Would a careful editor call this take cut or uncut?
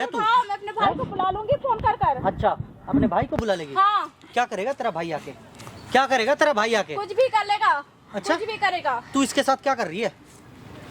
uncut